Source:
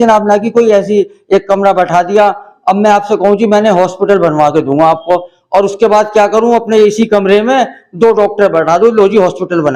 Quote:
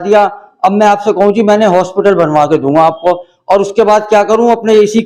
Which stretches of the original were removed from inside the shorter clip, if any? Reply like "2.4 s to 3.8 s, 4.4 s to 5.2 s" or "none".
none